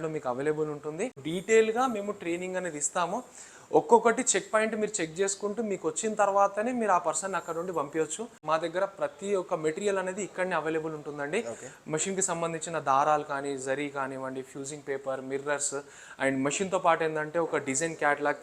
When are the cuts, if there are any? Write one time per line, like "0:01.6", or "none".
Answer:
0:01.2
0:08.4